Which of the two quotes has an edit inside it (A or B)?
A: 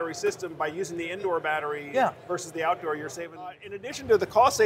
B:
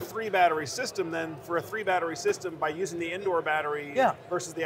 A